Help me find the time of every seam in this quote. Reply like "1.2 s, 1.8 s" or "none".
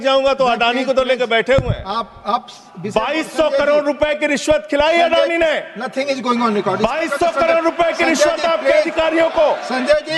none